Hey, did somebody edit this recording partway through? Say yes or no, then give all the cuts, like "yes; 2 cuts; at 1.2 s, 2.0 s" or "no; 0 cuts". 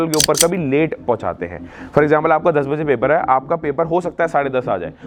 no; 0 cuts